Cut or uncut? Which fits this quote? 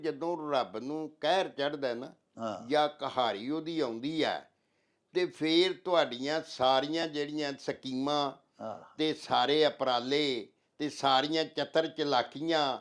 uncut